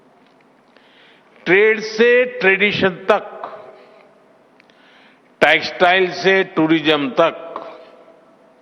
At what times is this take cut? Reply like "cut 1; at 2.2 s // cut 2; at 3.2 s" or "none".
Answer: none